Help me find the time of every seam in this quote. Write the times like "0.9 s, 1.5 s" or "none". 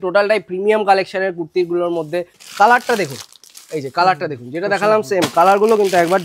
2.4 s